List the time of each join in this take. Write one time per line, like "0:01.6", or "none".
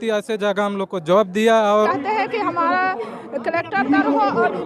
0:01.9